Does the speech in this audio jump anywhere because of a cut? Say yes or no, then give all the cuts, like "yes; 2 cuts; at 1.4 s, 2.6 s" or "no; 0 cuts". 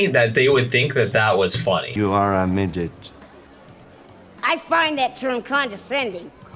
yes; 1 cut; at 1.9 s